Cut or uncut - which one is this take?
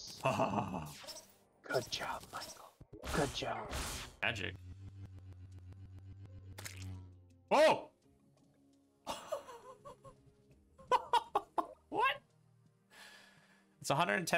cut